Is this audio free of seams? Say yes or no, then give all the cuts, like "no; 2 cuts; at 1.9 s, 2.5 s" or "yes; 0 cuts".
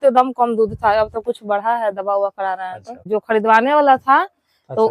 no; 1 cut; at 3.0 s